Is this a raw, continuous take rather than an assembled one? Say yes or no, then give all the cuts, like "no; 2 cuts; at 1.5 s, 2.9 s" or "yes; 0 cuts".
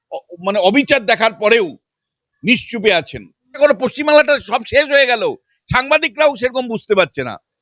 no; 1 cut; at 3.5 s